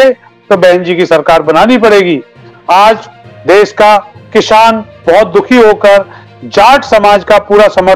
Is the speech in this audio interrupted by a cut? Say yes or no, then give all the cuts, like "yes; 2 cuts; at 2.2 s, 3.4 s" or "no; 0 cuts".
no; 0 cuts